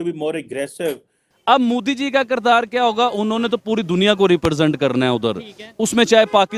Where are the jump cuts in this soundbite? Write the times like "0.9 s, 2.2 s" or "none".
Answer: 1.3 s